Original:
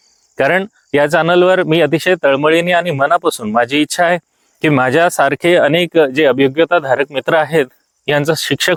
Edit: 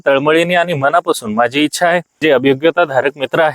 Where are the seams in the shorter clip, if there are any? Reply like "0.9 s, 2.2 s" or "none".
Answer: 2.2 s